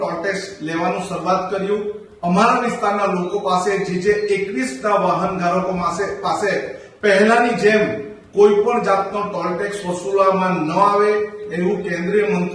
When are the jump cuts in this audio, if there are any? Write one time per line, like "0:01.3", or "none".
0:02.0